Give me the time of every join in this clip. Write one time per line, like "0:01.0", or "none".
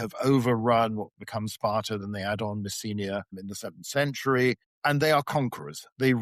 0:03.4
0:04.7